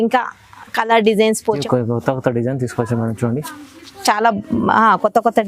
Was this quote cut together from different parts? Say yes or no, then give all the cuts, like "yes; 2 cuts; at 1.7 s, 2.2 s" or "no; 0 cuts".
yes; 1 cut; at 1.6 s